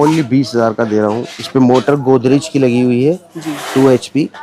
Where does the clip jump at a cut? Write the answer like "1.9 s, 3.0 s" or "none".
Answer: 1.3 s

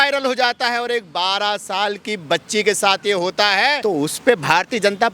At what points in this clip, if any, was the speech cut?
3.8 s

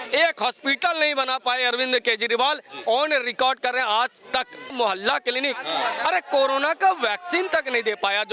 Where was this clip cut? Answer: 4.7 s

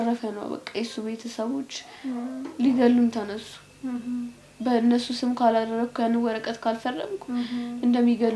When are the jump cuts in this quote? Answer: none

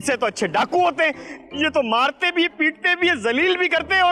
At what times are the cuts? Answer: none

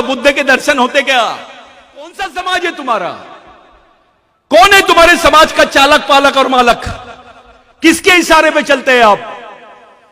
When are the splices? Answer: 2.1 s

